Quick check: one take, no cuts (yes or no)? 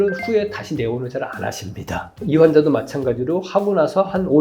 no